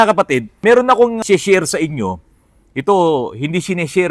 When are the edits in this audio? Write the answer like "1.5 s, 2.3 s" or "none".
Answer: 1.0 s